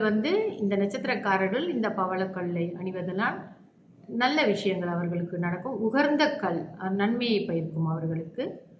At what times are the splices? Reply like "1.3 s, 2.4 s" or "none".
none